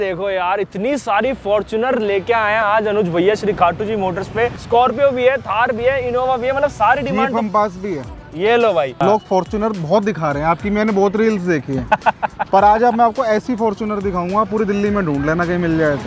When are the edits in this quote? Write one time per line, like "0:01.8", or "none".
0:09.0